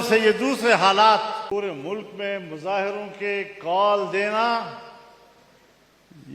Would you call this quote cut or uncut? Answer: cut